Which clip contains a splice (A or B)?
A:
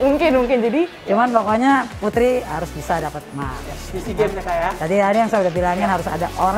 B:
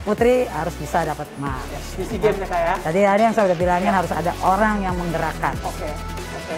A